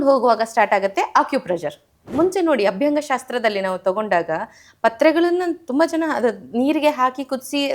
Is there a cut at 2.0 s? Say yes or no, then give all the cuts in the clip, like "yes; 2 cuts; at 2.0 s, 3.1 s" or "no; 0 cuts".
yes; 1 cut; at 2.0 s